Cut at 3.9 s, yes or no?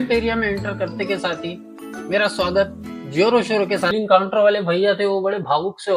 yes